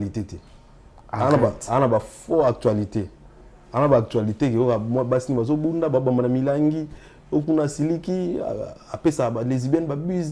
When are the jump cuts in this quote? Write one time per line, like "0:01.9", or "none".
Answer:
none